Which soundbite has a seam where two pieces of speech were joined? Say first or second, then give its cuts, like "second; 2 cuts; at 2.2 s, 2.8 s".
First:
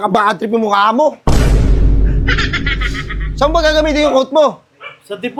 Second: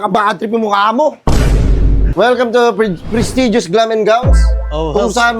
second; 1 cut; at 2.1 s